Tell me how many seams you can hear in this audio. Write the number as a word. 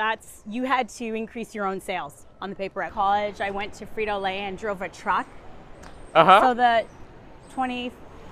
one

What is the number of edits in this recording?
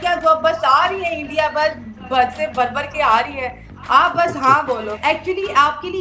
one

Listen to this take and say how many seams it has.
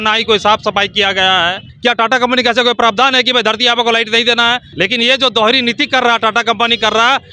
two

